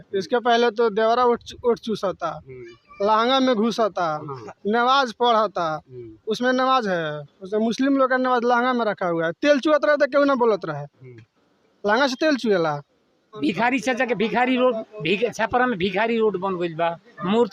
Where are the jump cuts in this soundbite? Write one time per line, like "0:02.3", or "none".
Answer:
0:13.4